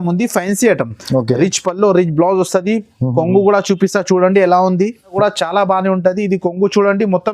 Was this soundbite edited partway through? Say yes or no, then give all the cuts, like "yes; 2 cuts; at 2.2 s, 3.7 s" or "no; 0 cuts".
yes; 1 cut; at 5.1 s